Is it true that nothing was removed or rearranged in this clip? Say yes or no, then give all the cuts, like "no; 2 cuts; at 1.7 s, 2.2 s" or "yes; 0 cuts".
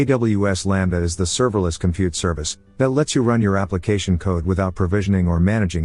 yes; 0 cuts